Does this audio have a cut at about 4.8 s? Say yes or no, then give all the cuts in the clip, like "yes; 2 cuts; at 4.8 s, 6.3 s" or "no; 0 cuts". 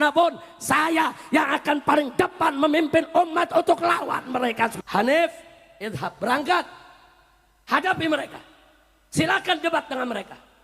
yes; 1 cut; at 4.8 s